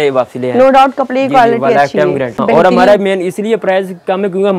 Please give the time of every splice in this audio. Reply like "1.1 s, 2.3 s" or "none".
2.4 s